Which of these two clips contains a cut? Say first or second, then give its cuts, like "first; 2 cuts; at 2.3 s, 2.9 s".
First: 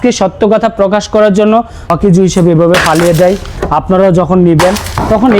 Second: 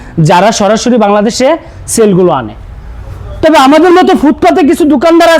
first; 1 cut; at 1.8 s